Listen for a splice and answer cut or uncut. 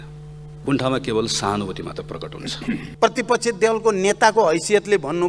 cut